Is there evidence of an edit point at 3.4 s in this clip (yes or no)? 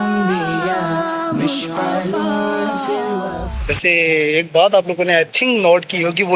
yes